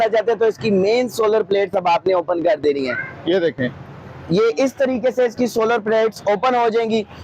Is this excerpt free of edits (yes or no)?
yes